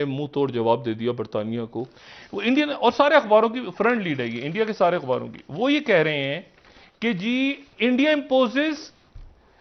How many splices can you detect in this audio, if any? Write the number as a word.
one